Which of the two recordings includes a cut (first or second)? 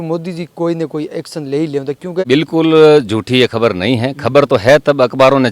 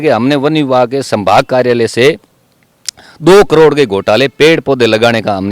first